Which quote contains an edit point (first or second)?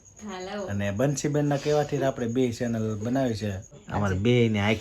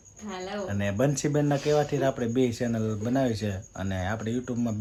first